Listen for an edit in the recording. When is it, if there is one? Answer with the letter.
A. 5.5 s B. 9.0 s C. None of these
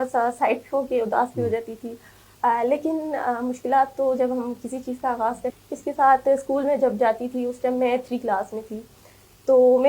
A